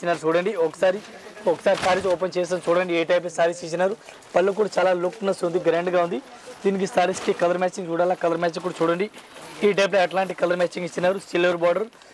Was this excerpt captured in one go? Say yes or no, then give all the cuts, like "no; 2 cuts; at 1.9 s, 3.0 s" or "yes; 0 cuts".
yes; 0 cuts